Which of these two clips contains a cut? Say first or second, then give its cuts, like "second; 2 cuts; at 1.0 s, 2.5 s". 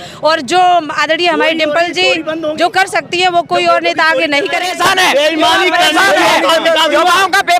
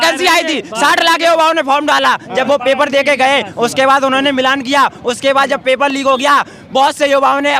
first; 1 cut; at 4.7 s